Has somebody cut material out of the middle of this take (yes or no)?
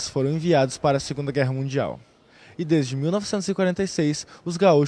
no